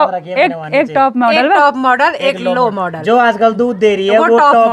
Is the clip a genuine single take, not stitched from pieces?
yes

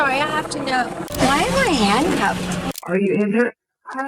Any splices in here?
yes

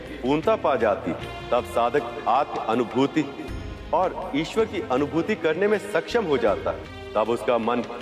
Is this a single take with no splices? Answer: no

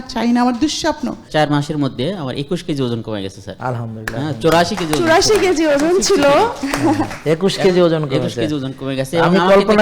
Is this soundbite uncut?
no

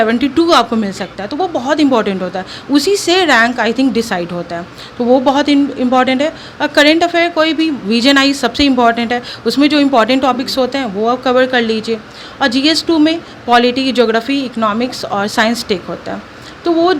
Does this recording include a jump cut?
no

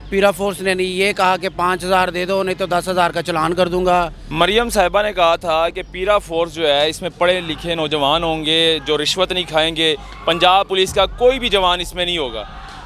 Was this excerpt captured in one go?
no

